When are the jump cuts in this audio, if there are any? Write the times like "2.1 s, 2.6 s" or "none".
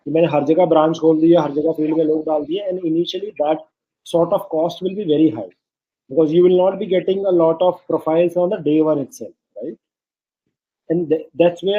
none

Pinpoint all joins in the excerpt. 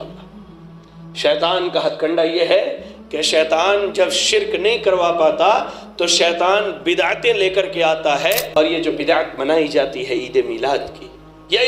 8.6 s

